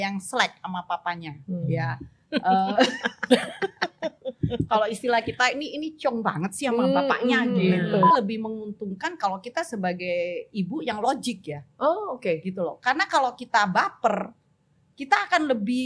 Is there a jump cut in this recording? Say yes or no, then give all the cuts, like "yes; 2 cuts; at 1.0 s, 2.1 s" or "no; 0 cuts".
yes; 1 cut; at 8.1 s